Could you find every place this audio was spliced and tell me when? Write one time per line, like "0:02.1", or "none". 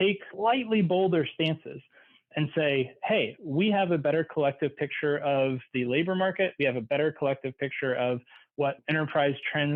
none